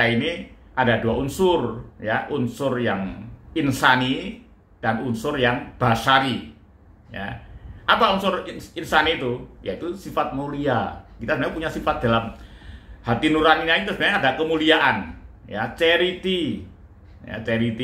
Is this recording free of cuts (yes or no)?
yes